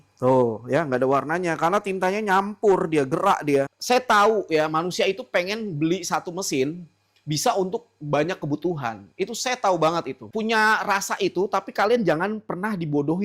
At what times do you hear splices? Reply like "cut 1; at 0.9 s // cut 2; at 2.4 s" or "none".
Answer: cut 1; at 3.8 s // cut 2; at 10.2 s